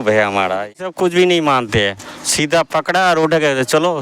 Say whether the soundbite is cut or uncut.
cut